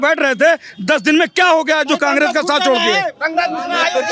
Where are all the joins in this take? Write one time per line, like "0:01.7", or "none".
none